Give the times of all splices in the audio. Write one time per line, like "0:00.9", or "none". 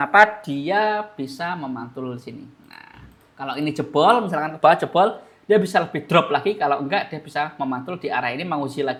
none